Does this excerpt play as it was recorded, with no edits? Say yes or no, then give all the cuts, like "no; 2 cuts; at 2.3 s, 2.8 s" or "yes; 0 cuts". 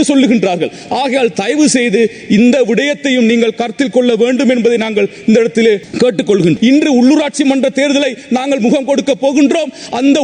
no; 1 cut; at 6.6 s